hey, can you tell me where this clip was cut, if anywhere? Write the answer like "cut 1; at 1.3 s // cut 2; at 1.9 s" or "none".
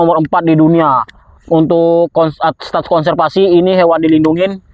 none